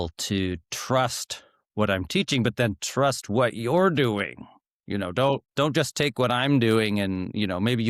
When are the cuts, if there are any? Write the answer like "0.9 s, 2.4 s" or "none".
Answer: 5.5 s